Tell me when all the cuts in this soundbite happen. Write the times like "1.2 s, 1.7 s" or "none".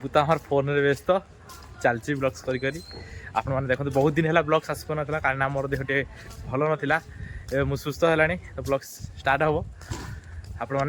none